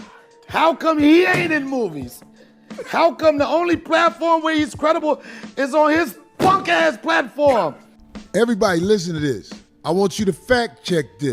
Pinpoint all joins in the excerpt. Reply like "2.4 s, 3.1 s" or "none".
7.8 s